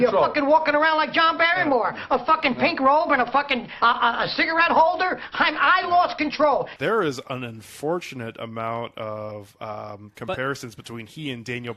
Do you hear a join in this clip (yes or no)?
yes